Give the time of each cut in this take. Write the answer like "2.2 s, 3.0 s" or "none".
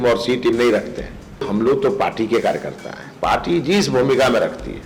1.5 s